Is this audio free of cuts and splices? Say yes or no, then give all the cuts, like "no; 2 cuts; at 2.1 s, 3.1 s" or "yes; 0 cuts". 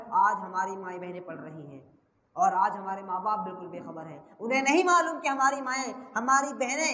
yes; 0 cuts